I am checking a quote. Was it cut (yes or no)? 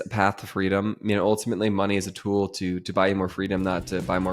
no